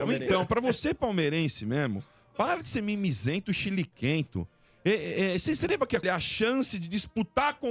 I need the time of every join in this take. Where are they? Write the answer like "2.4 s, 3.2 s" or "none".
6.0 s

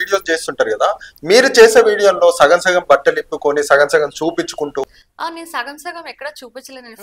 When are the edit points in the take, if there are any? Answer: 5.0 s

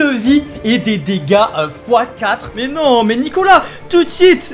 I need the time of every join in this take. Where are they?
2.6 s

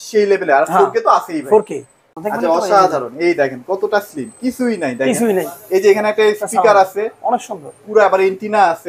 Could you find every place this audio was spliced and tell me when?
2.1 s

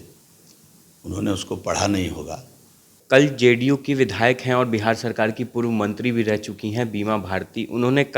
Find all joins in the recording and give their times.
2.9 s

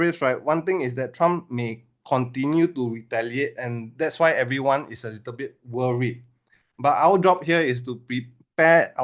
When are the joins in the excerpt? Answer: none

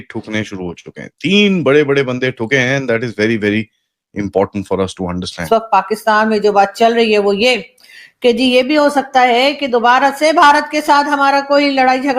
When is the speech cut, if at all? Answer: 5.4 s

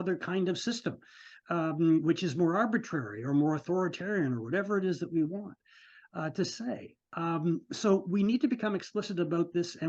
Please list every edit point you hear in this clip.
none

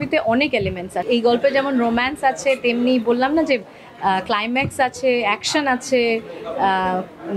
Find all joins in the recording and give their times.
1.0 s

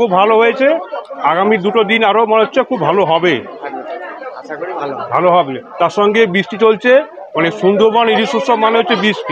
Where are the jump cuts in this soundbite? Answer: none

